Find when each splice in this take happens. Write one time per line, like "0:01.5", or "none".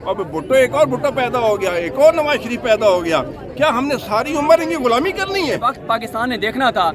0:05.7